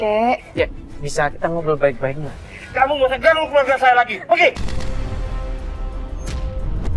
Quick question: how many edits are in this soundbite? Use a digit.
1